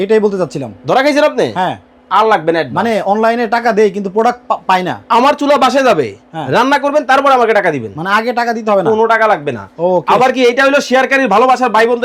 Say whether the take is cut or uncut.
uncut